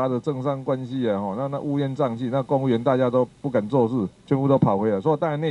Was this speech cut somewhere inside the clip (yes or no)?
yes